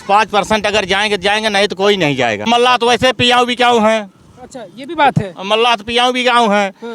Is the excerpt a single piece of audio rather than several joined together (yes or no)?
no